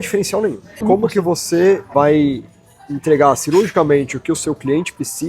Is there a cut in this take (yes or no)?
yes